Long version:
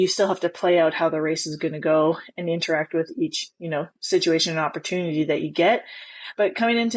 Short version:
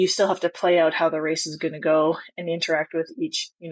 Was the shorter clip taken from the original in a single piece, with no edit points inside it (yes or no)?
yes